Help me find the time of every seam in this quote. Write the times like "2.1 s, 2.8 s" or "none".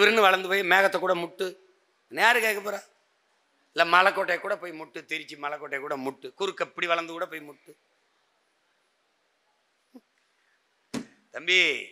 none